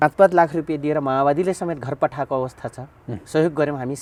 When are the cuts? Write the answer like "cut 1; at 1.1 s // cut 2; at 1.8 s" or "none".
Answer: none